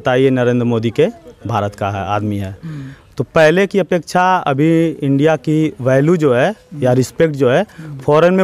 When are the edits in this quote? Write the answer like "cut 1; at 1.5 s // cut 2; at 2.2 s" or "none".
none